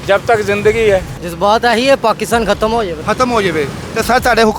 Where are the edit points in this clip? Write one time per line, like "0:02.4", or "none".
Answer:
0:01.2
0:03.0